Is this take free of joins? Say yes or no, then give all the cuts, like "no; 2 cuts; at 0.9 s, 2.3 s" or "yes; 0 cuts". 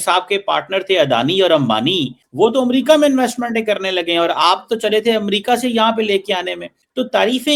yes; 0 cuts